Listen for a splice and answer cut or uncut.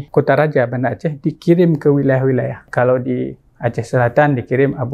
uncut